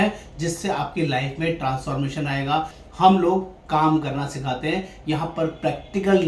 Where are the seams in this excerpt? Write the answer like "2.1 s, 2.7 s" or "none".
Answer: 2.8 s